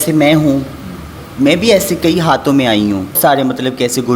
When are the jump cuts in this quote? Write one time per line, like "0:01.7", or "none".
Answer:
0:03.2